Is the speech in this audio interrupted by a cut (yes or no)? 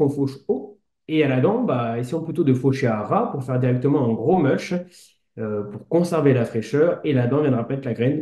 no